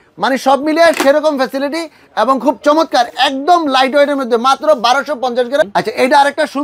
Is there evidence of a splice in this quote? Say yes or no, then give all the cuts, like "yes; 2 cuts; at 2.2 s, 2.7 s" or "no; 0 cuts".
yes; 1 cut; at 5.6 s